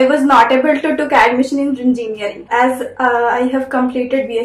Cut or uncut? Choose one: cut